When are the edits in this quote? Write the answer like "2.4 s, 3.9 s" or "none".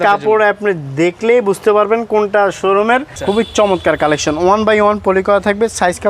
3.1 s